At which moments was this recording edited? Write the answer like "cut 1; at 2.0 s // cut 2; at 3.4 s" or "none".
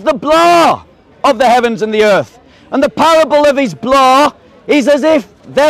none